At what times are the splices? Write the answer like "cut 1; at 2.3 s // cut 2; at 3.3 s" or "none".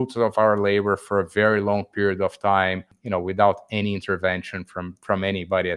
cut 1; at 2.9 s